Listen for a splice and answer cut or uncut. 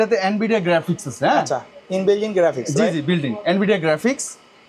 uncut